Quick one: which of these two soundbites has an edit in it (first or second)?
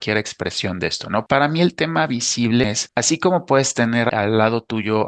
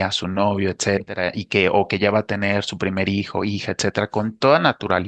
first